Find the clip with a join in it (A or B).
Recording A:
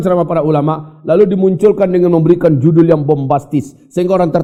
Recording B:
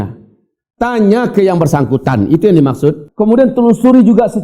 B